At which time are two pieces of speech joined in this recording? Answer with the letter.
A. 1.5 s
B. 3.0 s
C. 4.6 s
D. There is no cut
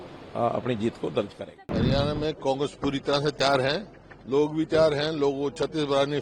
A